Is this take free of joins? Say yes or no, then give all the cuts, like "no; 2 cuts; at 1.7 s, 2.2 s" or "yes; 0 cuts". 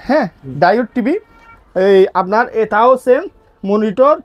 yes; 0 cuts